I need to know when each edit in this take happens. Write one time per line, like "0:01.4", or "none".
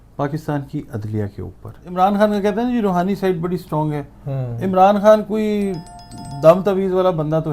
0:01.9